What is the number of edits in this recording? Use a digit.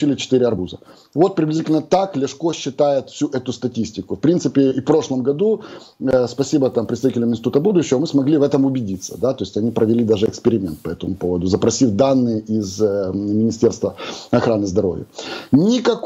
0